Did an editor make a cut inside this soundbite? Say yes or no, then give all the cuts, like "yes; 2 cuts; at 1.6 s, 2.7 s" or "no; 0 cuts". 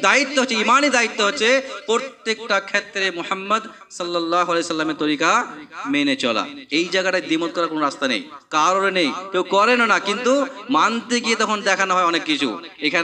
no; 0 cuts